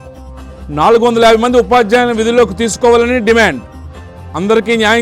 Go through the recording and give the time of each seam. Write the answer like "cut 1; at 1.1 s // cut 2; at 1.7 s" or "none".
none